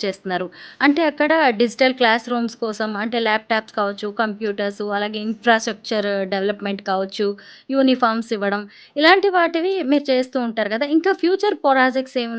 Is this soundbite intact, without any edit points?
yes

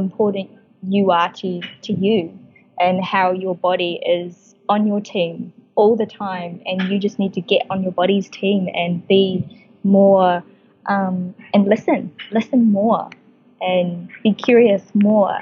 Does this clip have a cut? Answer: no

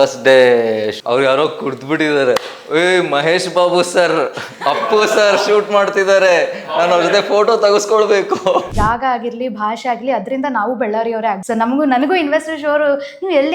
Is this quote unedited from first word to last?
no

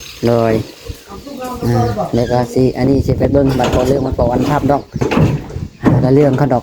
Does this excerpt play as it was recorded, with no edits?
no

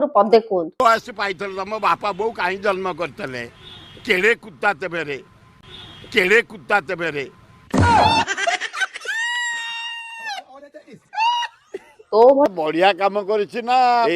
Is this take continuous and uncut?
no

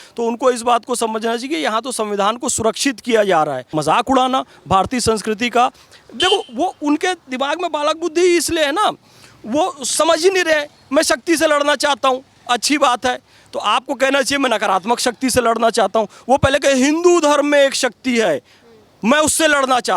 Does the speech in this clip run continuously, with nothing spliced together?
no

